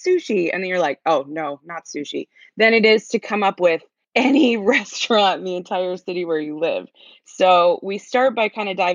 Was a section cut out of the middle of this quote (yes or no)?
yes